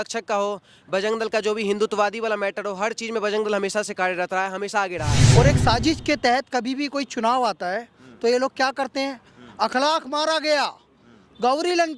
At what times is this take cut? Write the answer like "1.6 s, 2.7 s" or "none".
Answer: 5.2 s